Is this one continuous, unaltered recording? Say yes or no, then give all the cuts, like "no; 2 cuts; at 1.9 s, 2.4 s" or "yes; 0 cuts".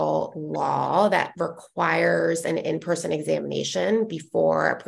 yes; 0 cuts